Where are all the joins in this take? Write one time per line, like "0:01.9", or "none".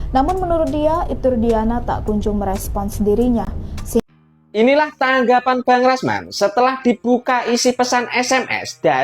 0:04.0